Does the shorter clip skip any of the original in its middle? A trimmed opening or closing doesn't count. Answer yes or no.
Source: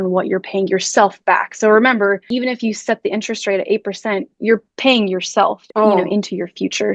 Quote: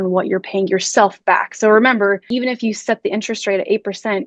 no